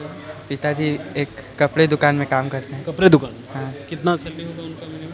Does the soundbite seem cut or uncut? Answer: uncut